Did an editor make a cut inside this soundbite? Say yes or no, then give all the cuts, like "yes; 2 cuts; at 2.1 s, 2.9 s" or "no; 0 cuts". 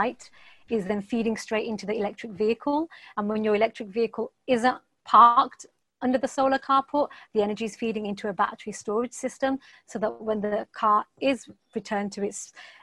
no; 0 cuts